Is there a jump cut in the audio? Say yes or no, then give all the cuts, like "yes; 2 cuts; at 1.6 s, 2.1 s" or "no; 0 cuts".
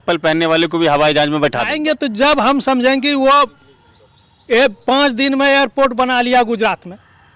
yes; 1 cut; at 1.7 s